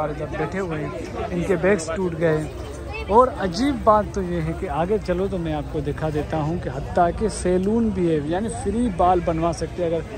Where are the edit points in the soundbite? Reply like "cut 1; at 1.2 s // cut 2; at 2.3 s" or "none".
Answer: none